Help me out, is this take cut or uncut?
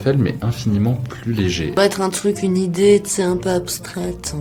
uncut